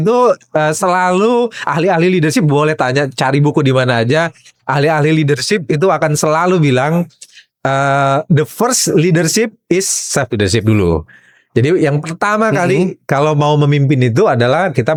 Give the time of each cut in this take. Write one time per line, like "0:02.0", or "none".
none